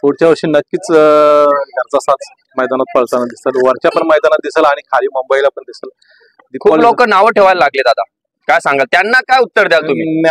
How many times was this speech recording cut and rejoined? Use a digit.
0